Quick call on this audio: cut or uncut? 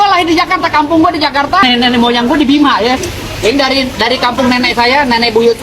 cut